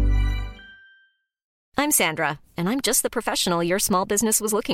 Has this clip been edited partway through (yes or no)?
yes